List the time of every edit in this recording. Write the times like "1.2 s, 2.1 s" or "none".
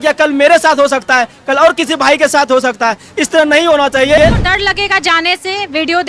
4.2 s